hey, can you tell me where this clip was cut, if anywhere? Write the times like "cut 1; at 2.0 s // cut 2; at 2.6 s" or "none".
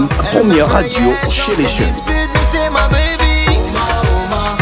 none